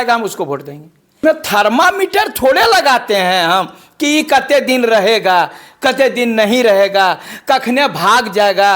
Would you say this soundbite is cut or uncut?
cut